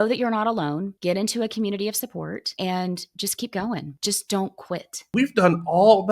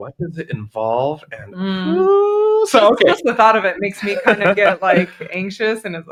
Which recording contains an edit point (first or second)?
first